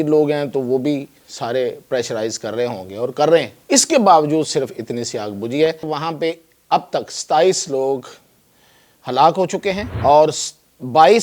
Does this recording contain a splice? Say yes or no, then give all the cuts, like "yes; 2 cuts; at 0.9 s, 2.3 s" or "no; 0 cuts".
yes; 3 cuts; at 3.6 s, 5.9 s, 9.9 s